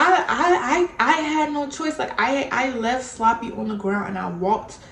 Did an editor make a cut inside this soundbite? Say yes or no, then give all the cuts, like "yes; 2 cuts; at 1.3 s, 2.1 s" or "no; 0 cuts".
no; 0 cuts